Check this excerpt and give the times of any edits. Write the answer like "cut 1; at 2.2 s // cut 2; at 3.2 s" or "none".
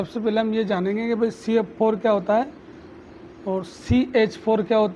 none